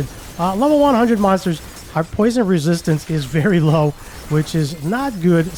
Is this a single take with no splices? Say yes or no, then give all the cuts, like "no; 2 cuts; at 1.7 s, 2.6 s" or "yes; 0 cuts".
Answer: yes; 0 cuts